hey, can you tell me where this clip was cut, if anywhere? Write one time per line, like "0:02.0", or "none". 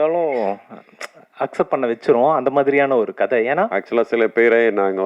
0:03.7